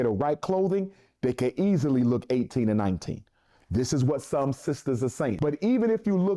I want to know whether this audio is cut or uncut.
cut